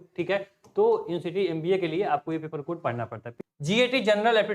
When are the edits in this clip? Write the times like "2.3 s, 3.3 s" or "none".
3.2 s